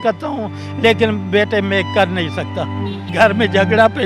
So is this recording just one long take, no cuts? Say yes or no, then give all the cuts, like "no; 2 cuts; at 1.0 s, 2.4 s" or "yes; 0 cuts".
no; 1 cut; at 3.1 s